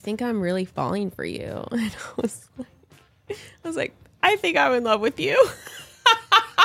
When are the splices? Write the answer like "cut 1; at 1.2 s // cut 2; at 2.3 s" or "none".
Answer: none